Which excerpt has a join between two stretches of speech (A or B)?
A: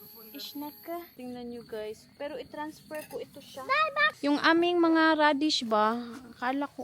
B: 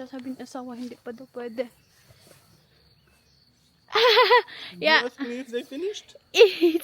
A